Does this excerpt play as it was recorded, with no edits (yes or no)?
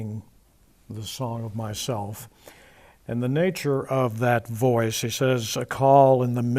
no